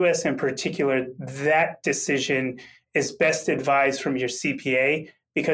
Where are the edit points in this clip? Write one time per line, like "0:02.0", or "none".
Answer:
none

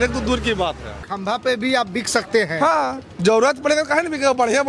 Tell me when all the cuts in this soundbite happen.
0:01.1

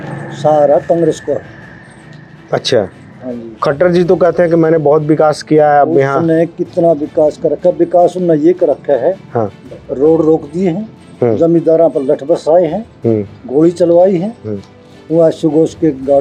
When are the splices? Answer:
none

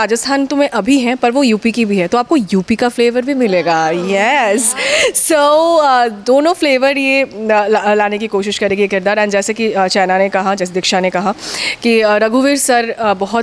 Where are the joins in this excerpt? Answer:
none

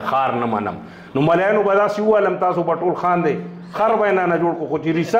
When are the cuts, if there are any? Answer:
none

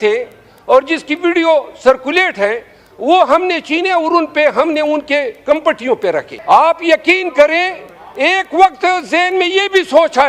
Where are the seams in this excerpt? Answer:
0:06.3

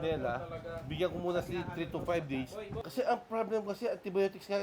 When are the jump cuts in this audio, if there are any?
0:02.8

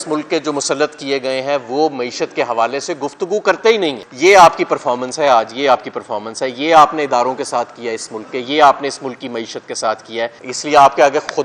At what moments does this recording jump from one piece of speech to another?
0:04.0
0:10.4

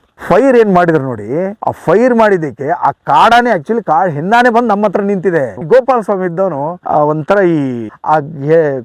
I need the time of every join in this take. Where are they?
0:05.6
0:07.8

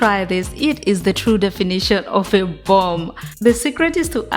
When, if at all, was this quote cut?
0:03.3

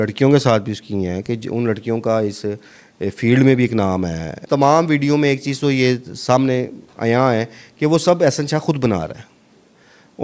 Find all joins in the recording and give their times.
0:04.4

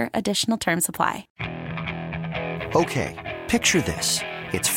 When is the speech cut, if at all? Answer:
0:01.3

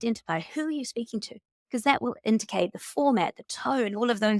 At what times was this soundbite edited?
0:02.0

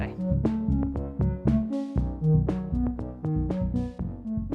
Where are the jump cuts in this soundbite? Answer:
none

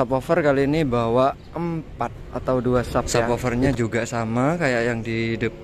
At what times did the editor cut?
0:03.3

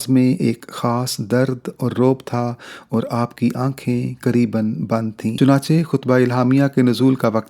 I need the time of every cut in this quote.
0:05.3

